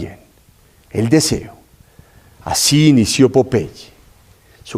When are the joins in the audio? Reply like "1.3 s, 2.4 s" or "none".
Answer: 2.3 s